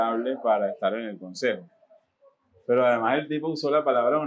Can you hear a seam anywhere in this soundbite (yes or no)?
no